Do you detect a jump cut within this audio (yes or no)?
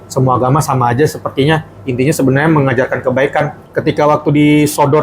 yes